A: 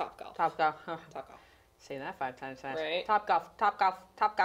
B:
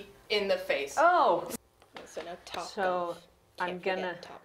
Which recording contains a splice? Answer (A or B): B